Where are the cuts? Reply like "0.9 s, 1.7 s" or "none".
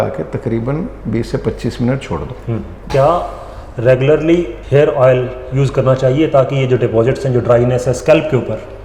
2.8 s, 4.6 s

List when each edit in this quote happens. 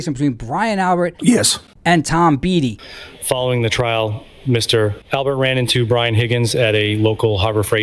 2.8 s

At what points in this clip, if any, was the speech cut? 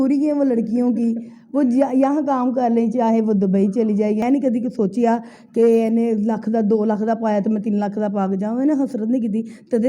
4.2 s

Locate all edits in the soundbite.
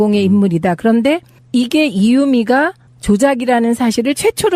2.5 s

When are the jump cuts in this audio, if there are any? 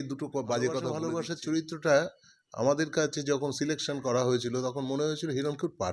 1.0 s

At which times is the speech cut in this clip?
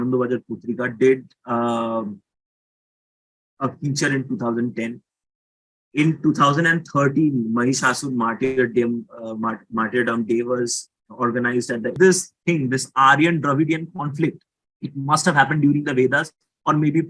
11.9 s

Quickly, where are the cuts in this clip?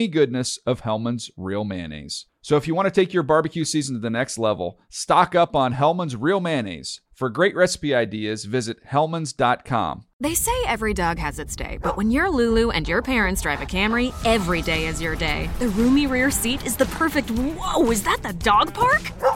10.1 s

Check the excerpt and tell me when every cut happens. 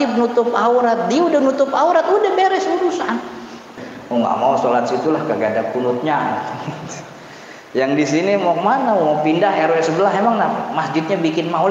3.7 s

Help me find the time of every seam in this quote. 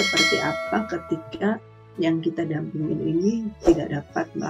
none

